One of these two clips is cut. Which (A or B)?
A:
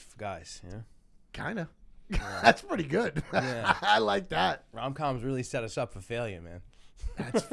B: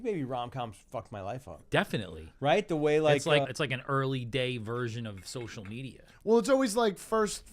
B